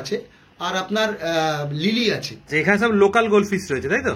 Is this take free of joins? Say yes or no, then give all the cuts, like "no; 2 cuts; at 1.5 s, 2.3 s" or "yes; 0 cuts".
no; 1 cut; at 2.3 s